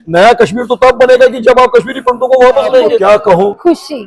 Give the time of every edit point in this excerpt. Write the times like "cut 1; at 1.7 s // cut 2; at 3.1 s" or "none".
cut 1; at 3.0 s